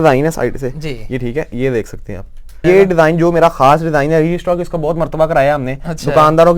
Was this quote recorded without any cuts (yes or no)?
no